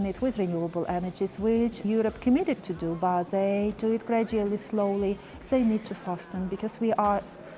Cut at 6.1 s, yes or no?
no